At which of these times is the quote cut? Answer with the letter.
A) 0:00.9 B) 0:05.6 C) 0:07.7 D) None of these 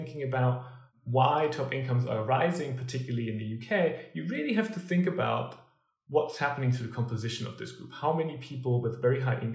A